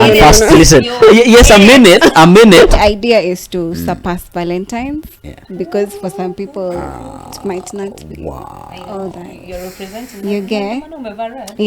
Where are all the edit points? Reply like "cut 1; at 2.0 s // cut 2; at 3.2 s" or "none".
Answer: cut 1; at 2.8 s